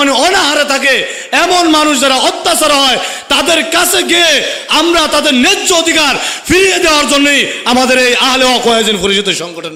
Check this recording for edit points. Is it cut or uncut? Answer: uncut